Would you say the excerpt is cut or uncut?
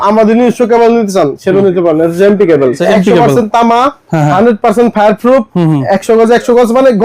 cut